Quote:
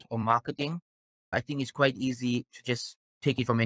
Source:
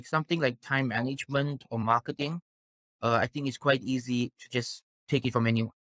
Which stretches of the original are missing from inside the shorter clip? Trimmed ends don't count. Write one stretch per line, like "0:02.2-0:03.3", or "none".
0:02.9-0:03.2